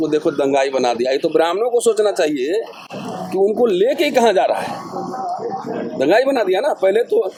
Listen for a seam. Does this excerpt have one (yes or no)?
no